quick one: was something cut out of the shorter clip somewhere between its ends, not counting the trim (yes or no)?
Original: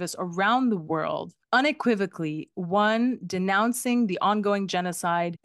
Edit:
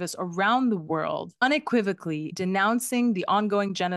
yes